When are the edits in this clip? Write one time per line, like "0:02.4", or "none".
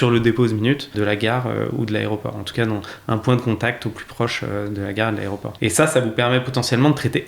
0:00.9
0:05.5